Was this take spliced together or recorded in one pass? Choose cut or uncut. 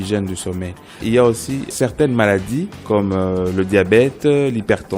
cut